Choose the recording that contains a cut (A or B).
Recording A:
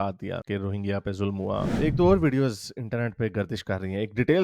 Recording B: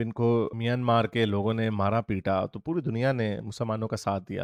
A